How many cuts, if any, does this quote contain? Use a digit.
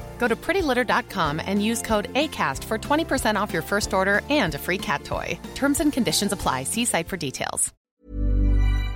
1